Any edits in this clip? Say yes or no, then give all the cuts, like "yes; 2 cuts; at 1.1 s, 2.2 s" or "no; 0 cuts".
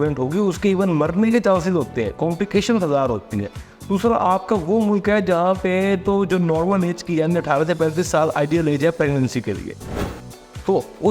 no; 0 cuts